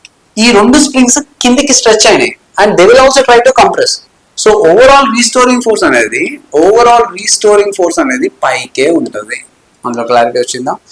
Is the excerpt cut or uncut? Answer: uncut